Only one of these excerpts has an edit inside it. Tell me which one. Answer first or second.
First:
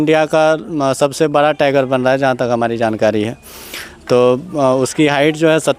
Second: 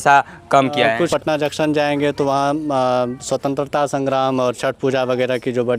second